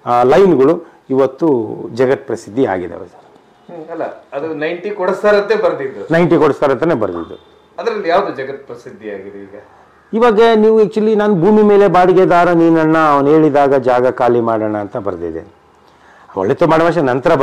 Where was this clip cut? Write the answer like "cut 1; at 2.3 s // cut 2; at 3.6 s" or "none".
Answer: none